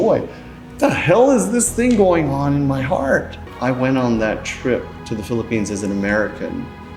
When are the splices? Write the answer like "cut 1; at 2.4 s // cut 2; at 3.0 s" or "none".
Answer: cut 1; at 3.4 s // cut 2; at 5.0 s